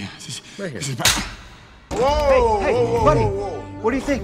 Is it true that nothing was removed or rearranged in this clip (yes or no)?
no